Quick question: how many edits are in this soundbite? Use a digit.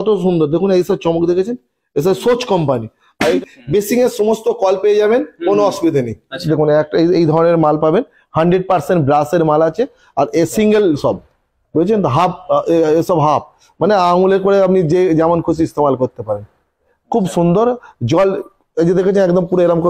3